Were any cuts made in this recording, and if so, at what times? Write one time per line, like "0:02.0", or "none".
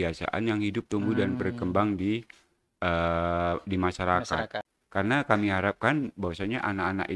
0:04.6